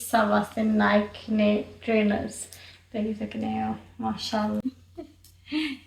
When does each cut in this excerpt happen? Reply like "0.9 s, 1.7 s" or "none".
4.6 s